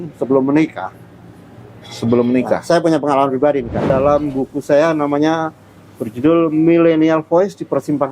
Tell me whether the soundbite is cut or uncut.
cut